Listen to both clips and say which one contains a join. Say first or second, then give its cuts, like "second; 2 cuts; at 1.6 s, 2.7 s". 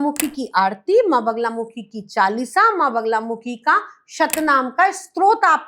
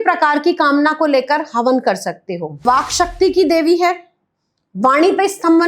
second; 1 cut; at 2.6 s